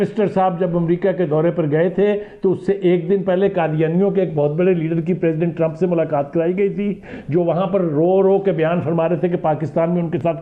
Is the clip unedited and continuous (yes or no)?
yes